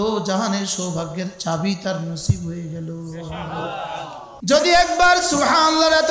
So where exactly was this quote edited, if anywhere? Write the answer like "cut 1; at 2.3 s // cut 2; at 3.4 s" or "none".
cut 1; at 4.3 s